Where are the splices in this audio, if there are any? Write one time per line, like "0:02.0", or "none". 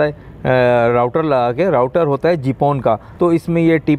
0:03.1